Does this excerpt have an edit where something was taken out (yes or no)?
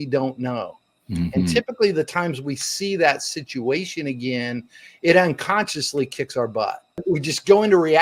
yes